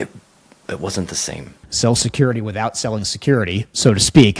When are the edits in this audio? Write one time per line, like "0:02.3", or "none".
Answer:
0:01.7